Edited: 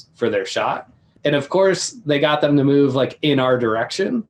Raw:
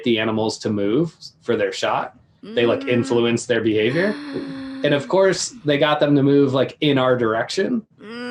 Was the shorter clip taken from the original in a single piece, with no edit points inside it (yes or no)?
no